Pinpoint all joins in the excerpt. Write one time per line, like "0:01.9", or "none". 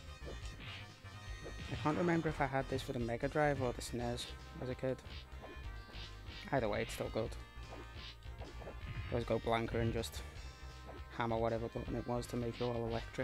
0:02.9